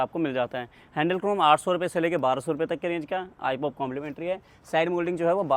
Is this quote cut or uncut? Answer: uncut